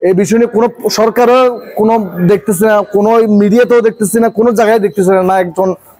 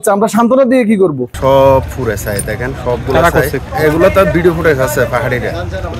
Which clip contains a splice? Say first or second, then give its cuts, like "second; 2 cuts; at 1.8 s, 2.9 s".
second; 2 cuts; at 1.3 s, 3.7 s